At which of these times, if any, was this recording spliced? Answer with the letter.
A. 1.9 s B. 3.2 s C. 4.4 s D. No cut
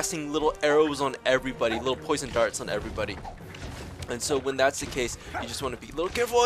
D